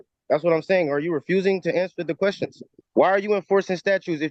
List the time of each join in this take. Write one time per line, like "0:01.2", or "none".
0:02.7